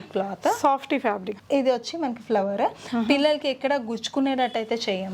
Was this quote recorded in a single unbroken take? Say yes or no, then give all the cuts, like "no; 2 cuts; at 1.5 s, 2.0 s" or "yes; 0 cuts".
yes; 0 cuts